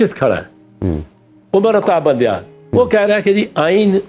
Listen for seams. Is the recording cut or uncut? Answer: uncut